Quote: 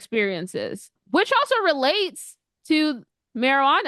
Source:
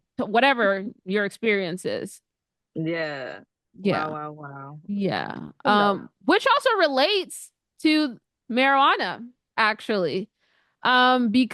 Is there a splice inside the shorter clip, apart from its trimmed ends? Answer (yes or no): yes